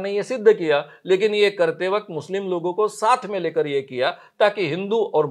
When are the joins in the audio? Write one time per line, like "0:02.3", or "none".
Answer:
none

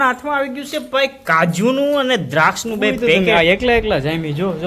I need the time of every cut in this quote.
0:03.2

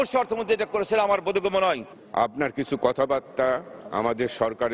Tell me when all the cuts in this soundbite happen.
none

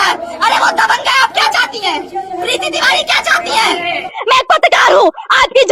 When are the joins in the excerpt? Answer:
0:04.1

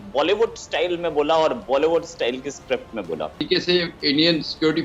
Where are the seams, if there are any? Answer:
0:03.5

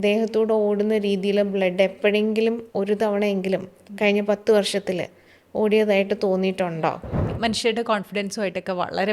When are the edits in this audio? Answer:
0:07.3

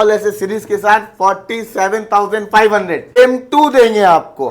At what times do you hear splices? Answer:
0:03.2

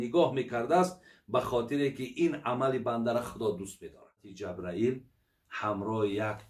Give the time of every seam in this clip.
0:04.3

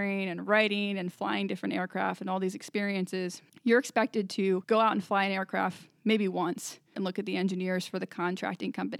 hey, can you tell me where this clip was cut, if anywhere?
0:03.4
0:04.6
0:06.9

